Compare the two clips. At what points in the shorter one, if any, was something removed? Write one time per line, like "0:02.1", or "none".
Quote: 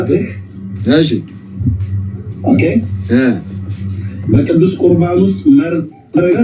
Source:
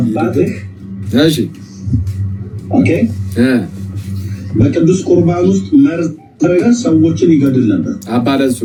none